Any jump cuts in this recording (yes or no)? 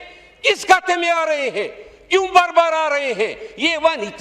no